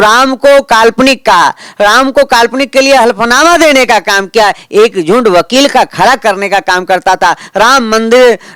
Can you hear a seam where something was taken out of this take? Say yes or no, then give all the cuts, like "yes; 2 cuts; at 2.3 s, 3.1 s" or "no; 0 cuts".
no; 0 cuts